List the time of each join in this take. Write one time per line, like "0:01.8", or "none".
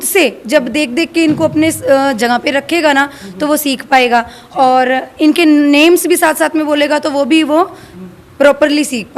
none